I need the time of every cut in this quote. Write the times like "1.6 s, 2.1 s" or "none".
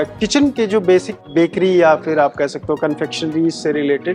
1.2 s

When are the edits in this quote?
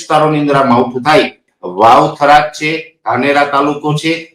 1.4 s

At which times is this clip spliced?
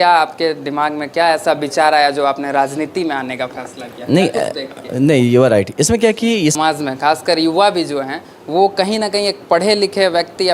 6.6 s

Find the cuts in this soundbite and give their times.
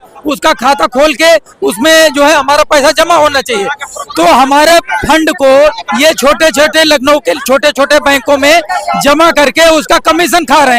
none

